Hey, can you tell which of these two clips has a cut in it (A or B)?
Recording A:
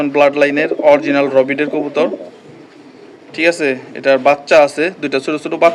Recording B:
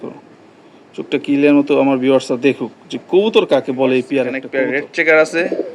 B